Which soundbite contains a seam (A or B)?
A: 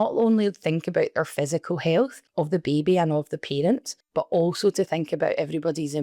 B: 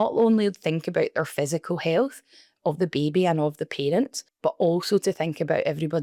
A